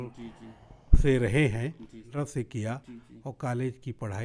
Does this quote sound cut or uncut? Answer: cut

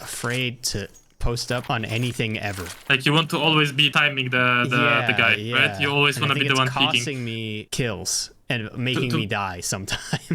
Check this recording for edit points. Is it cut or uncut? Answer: cut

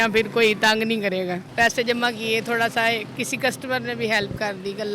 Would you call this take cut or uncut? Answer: cut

